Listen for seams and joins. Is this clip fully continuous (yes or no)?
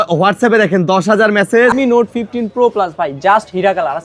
no